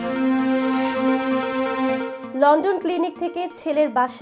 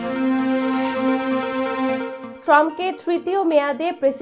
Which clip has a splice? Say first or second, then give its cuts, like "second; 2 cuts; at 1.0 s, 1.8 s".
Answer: second; 1 cut; at 2.2 s